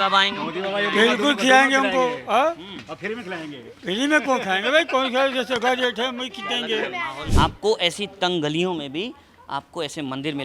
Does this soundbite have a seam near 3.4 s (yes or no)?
no